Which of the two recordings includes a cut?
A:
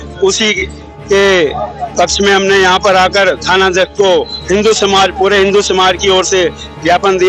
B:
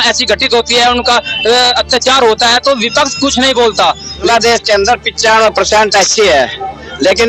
B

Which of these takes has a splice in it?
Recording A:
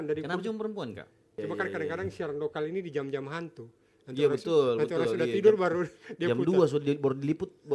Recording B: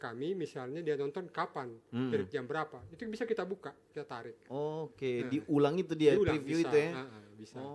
A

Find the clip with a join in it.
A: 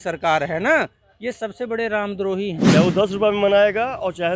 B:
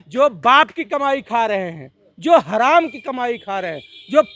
A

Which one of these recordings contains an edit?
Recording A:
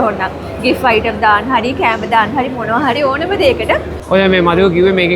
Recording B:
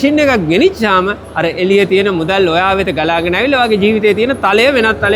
A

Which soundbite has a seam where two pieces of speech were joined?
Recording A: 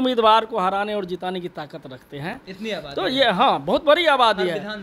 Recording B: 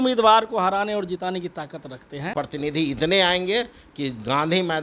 B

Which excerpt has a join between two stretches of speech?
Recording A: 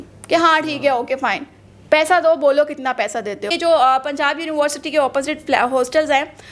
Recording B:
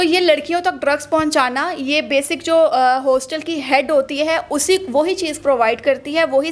A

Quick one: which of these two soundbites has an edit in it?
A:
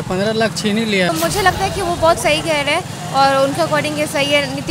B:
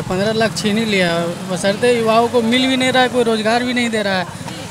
A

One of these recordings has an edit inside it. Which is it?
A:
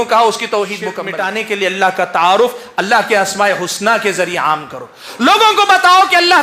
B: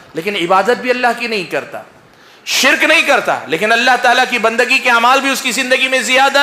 A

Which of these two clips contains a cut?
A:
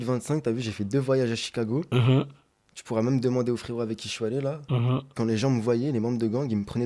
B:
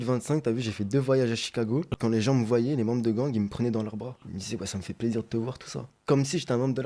B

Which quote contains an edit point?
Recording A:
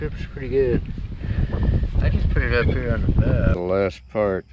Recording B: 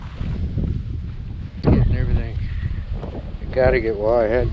A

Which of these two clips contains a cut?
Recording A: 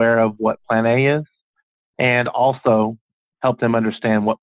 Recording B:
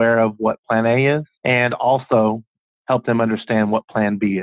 B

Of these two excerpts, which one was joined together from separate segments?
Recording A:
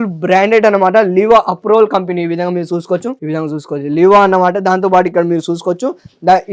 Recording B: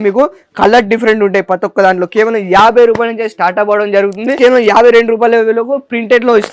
B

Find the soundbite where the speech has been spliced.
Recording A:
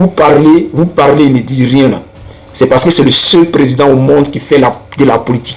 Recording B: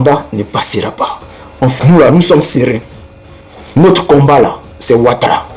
B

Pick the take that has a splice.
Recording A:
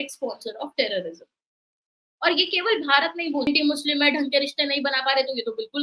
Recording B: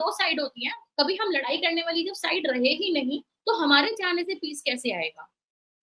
A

